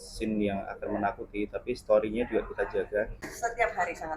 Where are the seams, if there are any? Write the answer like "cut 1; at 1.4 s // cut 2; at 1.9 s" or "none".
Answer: cut 1; at 3.3 s